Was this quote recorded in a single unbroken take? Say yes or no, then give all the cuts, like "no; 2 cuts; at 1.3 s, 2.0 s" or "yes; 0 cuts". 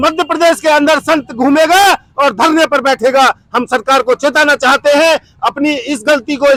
yes; 0 cuts